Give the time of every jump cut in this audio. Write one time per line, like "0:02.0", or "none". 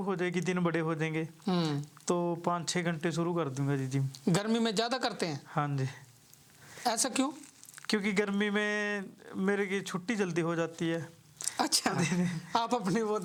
none